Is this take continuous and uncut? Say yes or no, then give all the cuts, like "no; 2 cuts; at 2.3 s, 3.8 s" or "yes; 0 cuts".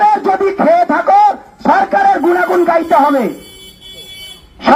yes; 0 cuts